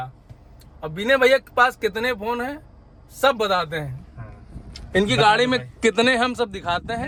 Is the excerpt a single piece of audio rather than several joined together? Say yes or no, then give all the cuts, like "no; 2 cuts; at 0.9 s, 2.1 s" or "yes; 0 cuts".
yes; 0 cuts